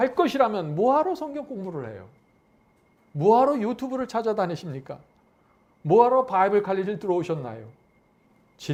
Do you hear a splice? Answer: no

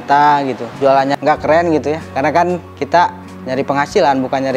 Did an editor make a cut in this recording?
yes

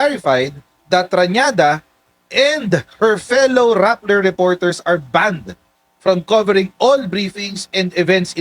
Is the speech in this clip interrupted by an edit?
no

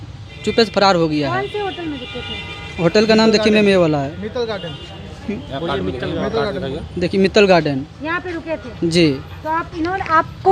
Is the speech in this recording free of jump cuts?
yes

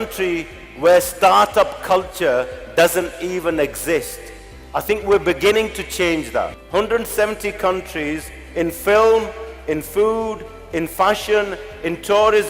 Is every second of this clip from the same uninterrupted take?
no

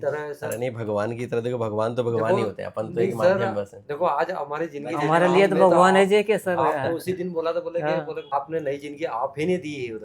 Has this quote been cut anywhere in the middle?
yes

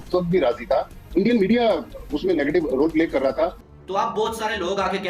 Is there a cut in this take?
yes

